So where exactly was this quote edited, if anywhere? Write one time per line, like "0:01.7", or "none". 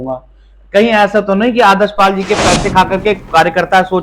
none